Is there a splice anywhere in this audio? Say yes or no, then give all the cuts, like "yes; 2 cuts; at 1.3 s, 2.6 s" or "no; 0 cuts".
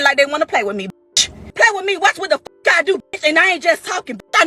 yes; 1 cut; at 1.4 s